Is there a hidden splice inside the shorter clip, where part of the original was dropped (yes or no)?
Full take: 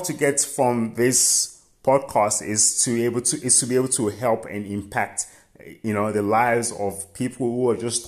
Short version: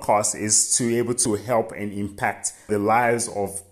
yes